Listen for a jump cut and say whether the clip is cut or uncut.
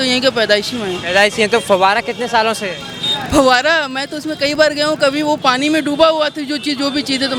uncut